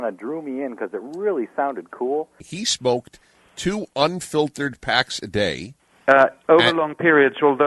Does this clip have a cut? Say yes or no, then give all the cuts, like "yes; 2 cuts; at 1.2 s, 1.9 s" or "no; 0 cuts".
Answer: yes; 1 cut; at 2.6 s